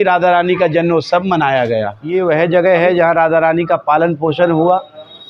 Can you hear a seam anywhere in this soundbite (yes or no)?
yes